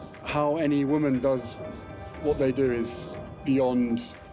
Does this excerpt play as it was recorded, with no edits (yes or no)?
yes